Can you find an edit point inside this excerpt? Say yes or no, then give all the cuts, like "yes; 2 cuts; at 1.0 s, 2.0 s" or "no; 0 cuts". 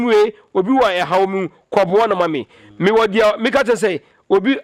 no; 0 cuts